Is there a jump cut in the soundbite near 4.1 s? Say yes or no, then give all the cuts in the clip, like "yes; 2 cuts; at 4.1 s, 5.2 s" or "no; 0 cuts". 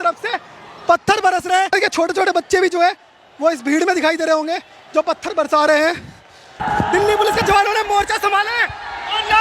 no; 2 cuts; at 1.7 s, 6.6 s